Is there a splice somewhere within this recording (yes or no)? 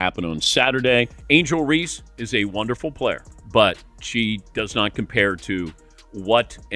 yes